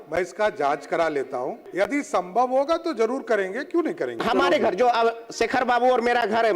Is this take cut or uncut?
cut